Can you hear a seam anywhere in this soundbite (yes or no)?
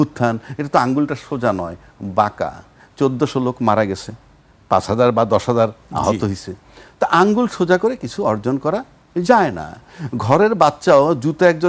no